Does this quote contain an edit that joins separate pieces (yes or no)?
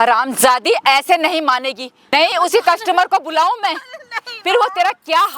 yes